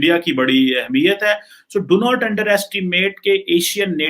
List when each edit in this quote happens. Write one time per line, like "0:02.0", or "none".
0:01.5